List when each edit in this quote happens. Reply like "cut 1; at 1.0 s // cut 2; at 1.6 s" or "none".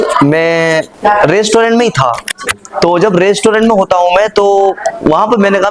cut 1; at 0.9 s